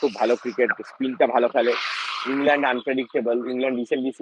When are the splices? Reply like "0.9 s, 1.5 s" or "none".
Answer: none